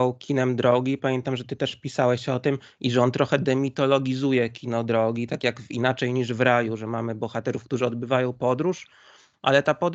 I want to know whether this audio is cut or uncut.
uncut